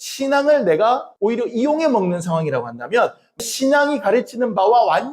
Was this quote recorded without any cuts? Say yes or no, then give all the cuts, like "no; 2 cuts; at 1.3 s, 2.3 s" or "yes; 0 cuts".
no; 2 cuts; at 1.1 s, 3.4 s